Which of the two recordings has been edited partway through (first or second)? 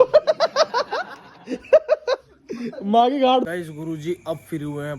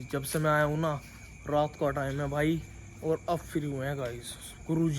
first